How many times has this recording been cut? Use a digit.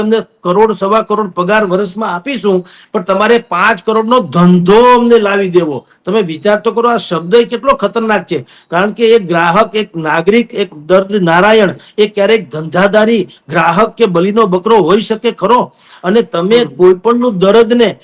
0